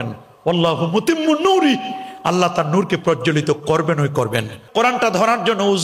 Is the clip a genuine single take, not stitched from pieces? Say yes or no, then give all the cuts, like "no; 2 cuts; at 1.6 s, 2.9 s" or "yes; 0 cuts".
no; 1 cut; at 4.6 s